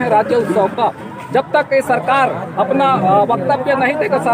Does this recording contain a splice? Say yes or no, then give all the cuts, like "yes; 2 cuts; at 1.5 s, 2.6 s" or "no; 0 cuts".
no; 0 cuts